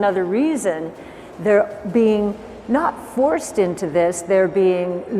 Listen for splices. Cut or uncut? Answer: uncut